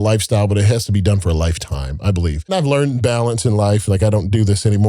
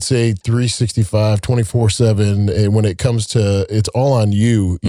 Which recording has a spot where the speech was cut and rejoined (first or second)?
first